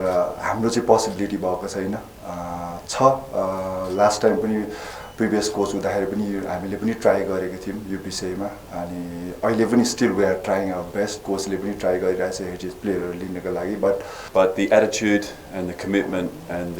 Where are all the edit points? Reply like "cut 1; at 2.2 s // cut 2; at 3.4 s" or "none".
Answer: cut 1; at 14.2 s